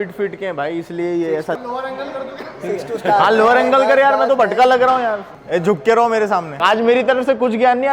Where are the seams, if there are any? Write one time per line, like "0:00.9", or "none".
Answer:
0:01.5
0:05.3
0:06.6

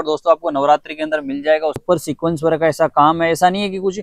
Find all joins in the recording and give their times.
0:01.8

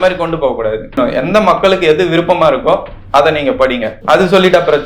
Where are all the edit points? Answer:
0:01.0
0:03.9

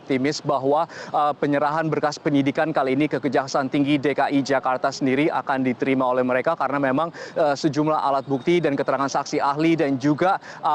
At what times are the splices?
0:04.8

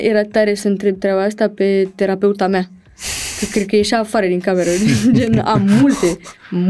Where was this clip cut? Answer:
none

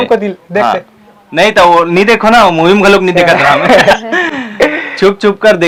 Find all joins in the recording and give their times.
none

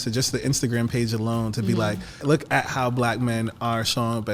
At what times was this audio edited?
0:02.2

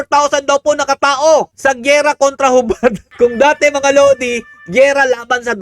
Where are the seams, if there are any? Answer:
0:03.0

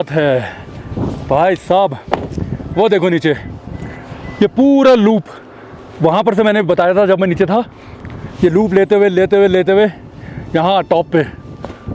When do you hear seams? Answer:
none

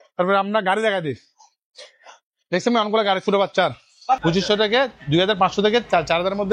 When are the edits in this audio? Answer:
0:04.2

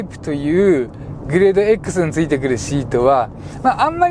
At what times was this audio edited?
none

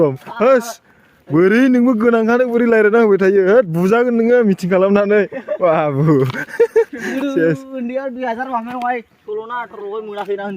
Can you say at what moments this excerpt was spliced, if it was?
0:09.2

